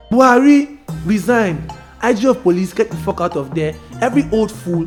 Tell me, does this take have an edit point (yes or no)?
no